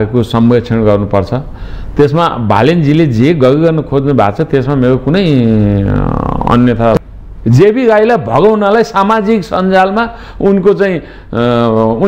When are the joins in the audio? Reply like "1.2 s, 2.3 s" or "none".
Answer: 7.0 s